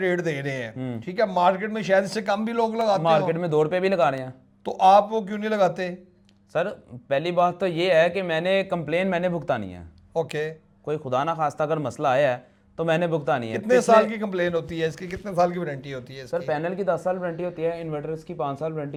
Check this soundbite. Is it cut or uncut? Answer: uncut